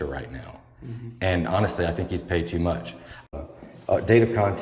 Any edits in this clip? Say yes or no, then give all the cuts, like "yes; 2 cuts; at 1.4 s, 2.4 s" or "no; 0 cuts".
yes; 1 cut; at 3.3 s